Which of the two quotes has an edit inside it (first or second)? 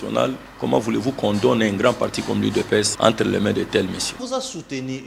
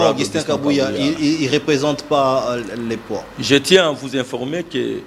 first